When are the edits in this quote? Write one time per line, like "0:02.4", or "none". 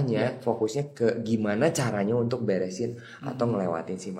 none

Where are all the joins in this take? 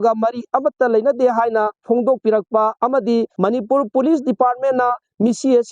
0:01.8
0:03.3

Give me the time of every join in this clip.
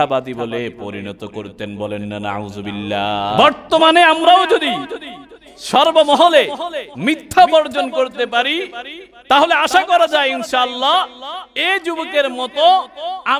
0:03.4

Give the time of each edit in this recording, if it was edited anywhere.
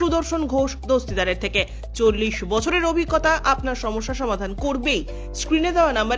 none

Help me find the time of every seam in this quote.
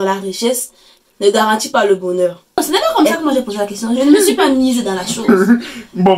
0:02.9

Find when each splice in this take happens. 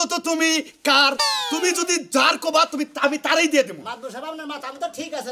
none

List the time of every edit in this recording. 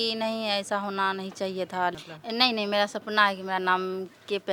0:02.0

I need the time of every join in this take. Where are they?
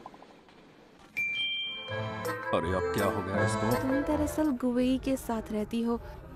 0:01.9
0:03.9

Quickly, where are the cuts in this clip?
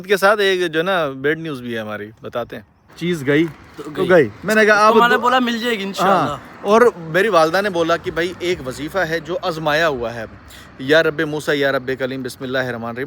0:02.9

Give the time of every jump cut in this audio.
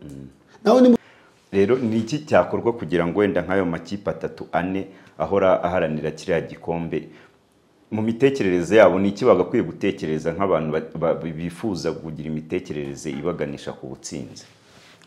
0:01.0

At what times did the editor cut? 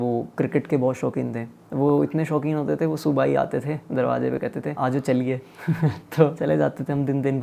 0:01.6
0:04.7
0:06.4

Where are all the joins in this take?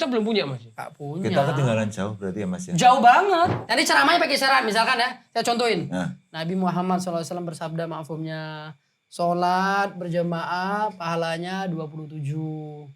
0:03.6

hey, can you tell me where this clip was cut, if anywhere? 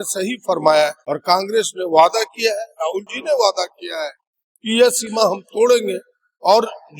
0:01.1

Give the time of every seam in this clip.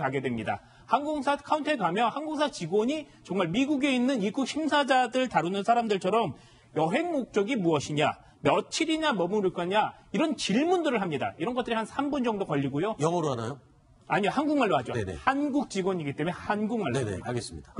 0:10.0

